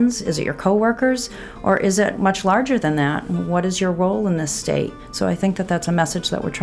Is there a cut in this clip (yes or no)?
yes